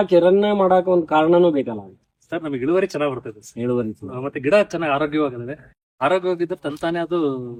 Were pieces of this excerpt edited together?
no; 0 cuts

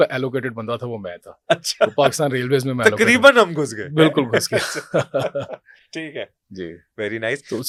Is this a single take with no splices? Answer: yes; 0 cuts

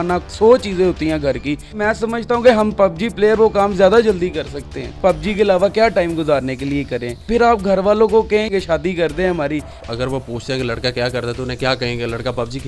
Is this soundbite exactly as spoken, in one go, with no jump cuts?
no; 5 cuts; at 1.8 s, 4.9 s, 7.2 s, 8.5 s, 9.8 s

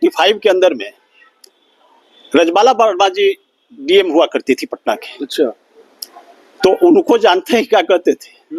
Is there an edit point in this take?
no; 0 cuts

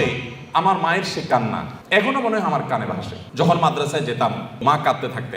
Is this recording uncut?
no; 3 cuts; at 1.7 s, 3.2 s, 4.6 s

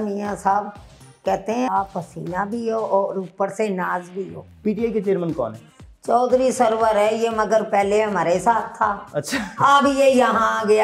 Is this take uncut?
no; 2 cuts; at 1.7 s, 4.5 s

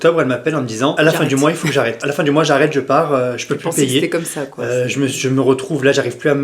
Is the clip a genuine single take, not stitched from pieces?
no; 2 cuts; at 0.9 s, 2.0 s

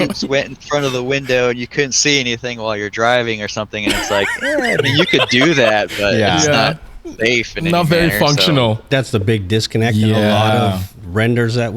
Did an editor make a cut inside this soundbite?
yes; 1 cut; at 8.9 s

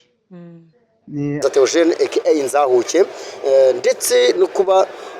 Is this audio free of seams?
no; 1 cut; at 1.4 s

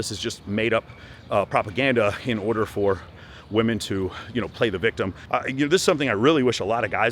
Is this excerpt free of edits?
no; 1 cut; at 5.2 s

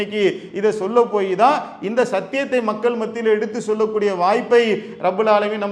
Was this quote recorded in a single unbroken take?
yes; 0 cuts

